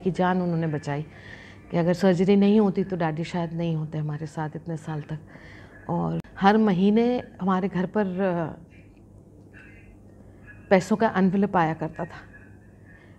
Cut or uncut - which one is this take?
cut